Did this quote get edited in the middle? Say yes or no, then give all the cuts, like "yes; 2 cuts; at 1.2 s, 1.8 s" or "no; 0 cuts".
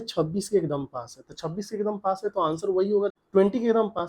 yes; 1 cut; at 3.2 s